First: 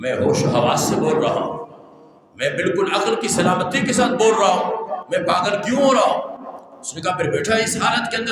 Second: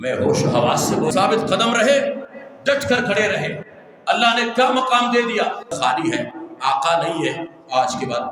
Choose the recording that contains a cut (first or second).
second